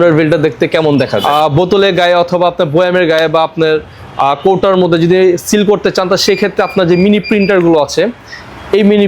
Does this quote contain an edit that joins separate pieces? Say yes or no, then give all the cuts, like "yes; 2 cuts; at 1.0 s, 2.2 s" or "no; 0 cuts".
yes; 1 cut; at 1.2 s